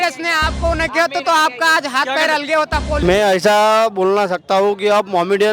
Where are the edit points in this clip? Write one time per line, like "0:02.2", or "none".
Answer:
0:03.0